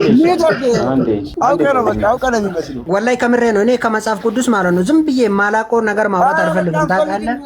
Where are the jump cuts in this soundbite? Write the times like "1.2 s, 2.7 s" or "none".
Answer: 1.3 s, 2.7 s